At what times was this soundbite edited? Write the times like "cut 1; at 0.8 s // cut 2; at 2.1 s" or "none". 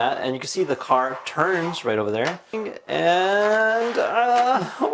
cut 1; at 2.7 s